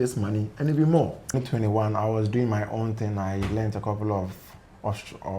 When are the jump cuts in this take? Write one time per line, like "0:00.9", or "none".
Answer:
0:01.4